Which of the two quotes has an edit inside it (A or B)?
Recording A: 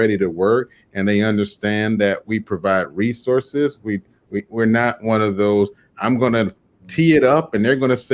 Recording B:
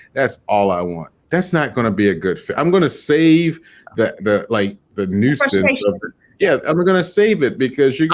B